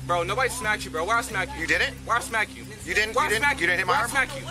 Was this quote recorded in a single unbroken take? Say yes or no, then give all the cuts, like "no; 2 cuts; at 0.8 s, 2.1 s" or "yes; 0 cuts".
yes; 0 cuts